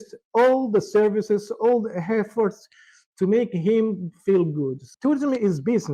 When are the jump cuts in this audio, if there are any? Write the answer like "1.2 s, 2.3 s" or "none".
4.8 s